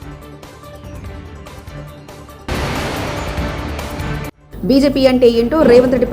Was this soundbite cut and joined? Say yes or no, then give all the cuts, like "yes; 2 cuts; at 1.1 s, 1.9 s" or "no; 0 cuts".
no; 0 cuts